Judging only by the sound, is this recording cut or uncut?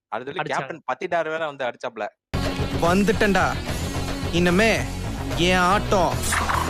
uncut